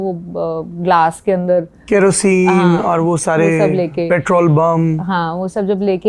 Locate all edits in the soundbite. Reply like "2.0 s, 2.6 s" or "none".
none